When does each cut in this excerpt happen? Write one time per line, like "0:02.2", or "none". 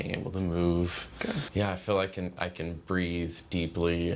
0:01.4

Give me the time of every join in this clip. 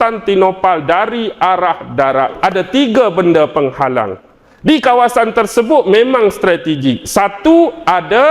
0:02.4

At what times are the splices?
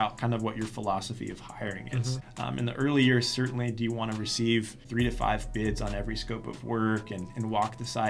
0:02.2
0:04.8

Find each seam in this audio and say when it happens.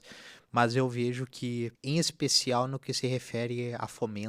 0:01.8

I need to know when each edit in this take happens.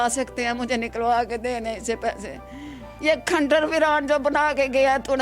0:02.9

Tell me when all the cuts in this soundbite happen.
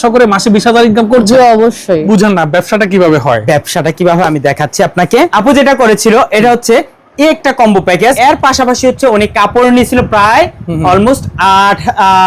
0:02.1
0:05.3
0:08.2

